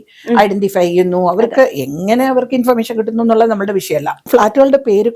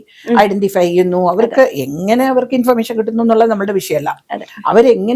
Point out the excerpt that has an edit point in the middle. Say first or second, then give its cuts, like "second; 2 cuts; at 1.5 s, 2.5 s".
first; 1 cut; at 4.2 s